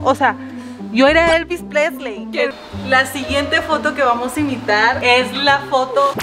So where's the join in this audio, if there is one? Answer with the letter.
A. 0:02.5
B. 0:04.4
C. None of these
A